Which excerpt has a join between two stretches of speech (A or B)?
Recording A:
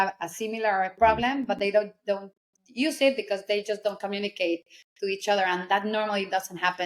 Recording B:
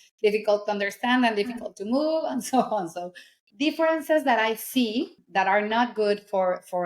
B